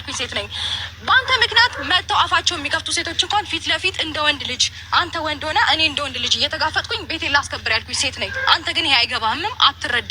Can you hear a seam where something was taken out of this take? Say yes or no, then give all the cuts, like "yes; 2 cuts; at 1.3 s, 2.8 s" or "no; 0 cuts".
yes; 1 cut; at 8.8 s